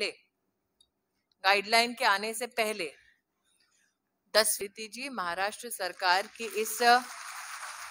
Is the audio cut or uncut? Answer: cut